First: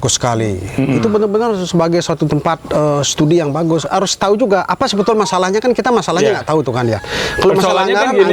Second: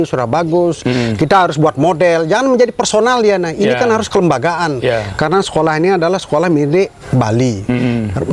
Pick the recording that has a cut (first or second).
first